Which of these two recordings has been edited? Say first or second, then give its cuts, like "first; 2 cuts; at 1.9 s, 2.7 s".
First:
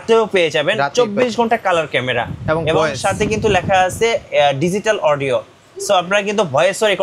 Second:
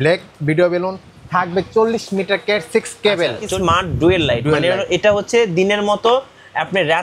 second; 1 cut; at 3.4 s